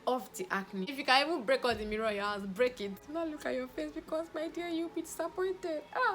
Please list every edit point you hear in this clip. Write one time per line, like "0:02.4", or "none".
0:00.9
0:03.0